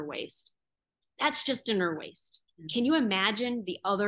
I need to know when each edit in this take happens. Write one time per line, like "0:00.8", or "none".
0:02.4